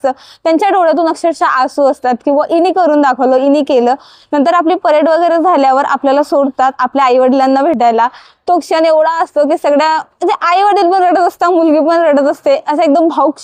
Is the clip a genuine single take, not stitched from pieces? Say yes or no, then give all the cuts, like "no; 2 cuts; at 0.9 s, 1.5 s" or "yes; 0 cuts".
yes; 0 cuts